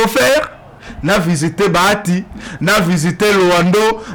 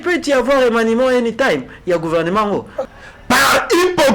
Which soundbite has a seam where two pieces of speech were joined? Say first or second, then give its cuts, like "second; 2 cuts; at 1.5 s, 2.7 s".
second; 1 cut; at 2.8 s